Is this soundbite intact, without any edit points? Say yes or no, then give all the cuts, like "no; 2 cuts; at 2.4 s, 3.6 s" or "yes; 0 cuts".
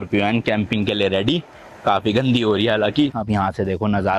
no; 1 cut; at 3.1 s